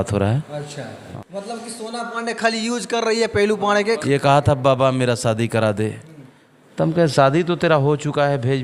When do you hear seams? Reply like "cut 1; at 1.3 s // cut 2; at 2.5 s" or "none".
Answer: cut 1; at 1.1 s // cut 2; at 4.0 s